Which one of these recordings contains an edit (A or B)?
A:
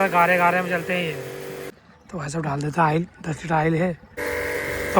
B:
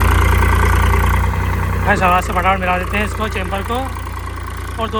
A